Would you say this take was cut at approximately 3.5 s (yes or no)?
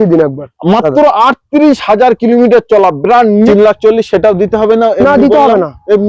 yes